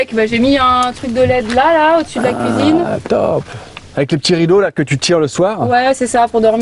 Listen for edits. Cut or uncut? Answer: uncut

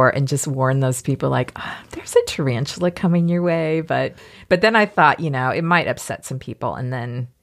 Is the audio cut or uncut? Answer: cut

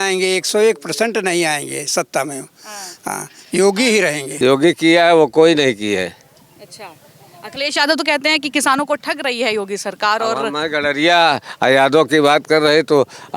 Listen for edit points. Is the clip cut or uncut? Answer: cut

